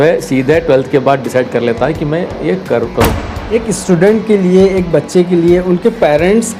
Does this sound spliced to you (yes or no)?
yes